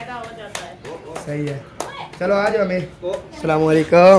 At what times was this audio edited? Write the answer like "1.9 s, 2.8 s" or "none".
3.3 s